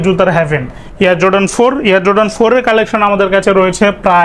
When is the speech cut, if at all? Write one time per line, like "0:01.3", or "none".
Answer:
none